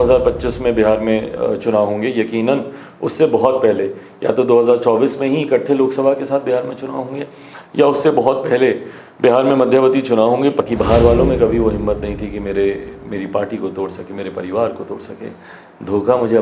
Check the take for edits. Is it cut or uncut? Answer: cut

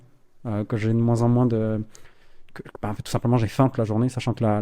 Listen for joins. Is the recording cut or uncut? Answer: uncut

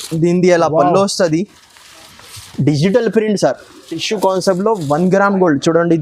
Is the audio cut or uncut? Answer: cut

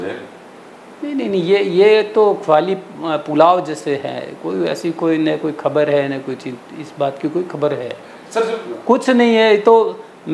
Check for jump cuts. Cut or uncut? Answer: uncut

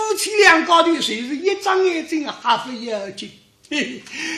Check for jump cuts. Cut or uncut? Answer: uncut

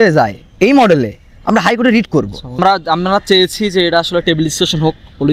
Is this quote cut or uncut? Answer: cut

